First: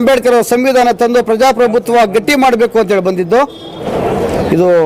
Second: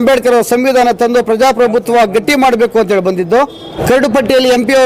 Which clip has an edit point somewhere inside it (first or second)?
second